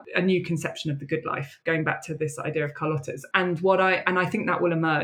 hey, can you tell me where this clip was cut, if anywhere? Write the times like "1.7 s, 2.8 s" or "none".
none